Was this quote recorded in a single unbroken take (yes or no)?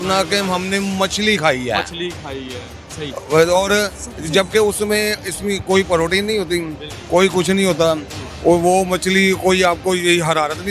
yes